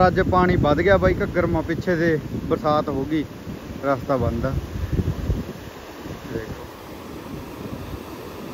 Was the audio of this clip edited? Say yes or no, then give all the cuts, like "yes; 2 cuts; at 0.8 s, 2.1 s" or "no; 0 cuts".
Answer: no; 0 cuts